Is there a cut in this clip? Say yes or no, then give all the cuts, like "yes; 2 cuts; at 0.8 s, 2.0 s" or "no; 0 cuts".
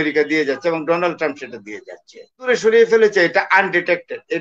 yes; 1 cut; at 2.5 s